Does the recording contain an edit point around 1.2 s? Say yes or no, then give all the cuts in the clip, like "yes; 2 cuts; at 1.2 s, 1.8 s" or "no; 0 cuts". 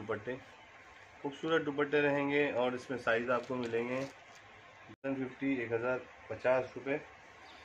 no; 1 cut; at 5.0 s